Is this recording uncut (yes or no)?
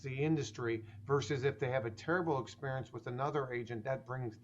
yes